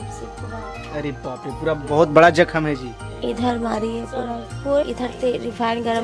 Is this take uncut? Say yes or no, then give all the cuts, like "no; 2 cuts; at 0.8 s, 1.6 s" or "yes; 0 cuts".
no; 1 cut; at 4.8 s